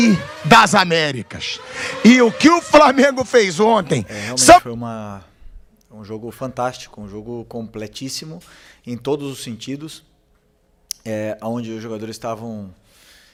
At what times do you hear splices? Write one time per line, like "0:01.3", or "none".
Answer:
none